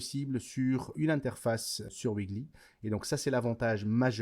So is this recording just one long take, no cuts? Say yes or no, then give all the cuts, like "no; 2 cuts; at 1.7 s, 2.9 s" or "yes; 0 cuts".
no; 2 cuts; at 0.9 s, 1.9 s